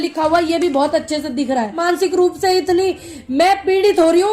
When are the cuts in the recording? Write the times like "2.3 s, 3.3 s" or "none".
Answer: 1.8 s